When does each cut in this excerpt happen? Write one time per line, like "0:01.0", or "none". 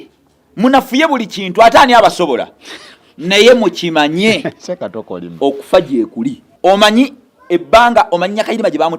0:06.4